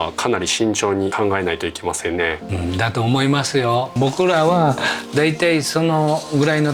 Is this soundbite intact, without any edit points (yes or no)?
no